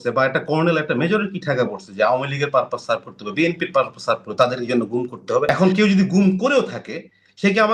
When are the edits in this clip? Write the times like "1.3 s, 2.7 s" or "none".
5.5 s